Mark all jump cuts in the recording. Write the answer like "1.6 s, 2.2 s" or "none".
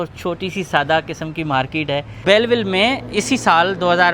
2.2 s